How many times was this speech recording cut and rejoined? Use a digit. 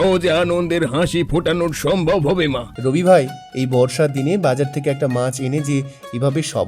1